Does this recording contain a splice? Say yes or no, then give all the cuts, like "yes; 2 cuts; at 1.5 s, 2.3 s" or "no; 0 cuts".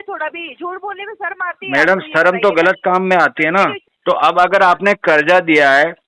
yes; 1 cut; at 3.9 s